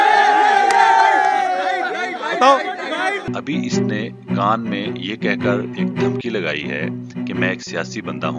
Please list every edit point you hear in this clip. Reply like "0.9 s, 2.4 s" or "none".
3.3 s